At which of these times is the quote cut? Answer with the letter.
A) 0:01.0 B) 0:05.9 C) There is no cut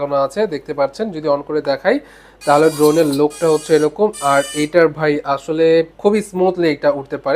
B